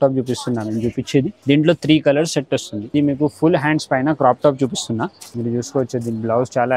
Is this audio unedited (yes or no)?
no